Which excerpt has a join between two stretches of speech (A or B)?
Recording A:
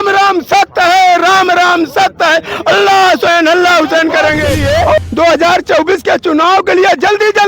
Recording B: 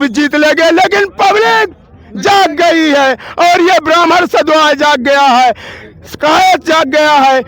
A